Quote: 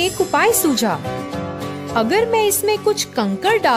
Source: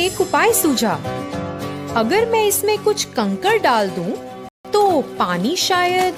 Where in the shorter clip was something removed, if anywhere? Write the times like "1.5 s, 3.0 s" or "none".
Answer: none